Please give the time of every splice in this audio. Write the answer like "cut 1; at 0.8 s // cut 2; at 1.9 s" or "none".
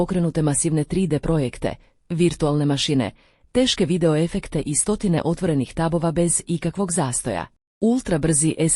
cut 1; at 7.2 s